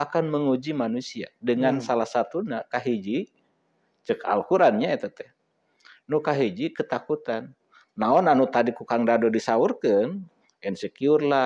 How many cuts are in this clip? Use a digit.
0